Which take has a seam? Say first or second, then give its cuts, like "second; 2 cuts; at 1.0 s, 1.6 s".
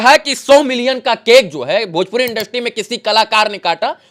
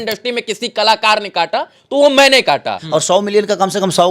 second; 1 cut; at 2.8 s